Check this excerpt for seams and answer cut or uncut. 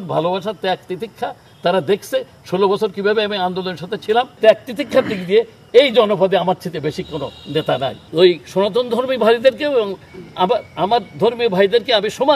cut